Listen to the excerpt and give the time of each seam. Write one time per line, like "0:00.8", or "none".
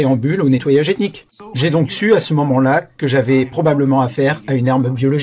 0:01.3